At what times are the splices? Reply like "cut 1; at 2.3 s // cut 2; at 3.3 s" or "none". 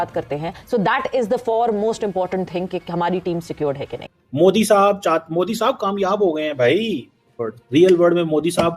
cut 1; at 4.0 s

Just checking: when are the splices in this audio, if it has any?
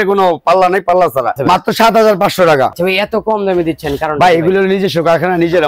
cut 1; at 1.4 s // cut 2; at 2.7 s

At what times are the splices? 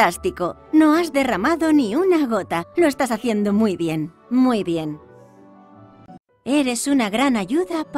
none

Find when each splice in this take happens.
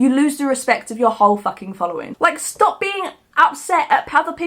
cut 1; at 2.0 s

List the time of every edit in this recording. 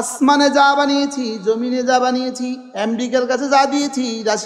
none

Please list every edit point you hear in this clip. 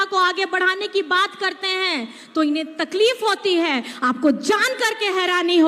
none

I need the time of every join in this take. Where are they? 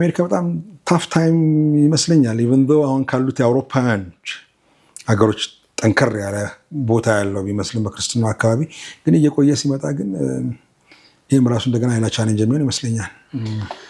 none

